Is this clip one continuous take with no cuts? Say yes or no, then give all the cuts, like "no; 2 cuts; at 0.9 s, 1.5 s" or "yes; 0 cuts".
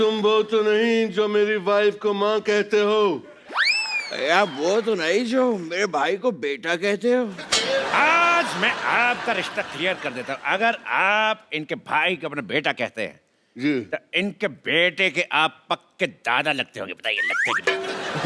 yes; 0 cuts